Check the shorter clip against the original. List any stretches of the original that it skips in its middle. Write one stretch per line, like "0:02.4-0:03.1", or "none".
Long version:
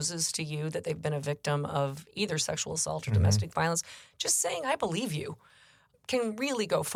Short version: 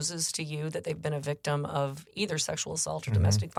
none